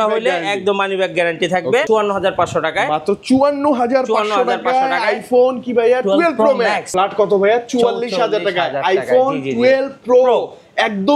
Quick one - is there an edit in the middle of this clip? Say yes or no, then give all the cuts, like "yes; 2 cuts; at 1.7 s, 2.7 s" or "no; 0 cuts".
yes; 2 cuts; at 1.8 s, 6.8 s